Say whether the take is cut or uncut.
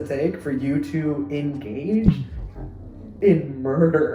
uncut